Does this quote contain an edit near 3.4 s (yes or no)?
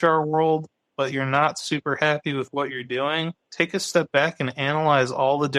yes